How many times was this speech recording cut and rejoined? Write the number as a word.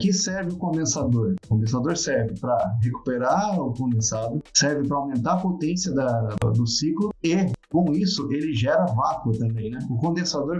zero